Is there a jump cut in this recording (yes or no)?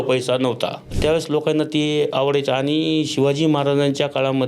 yes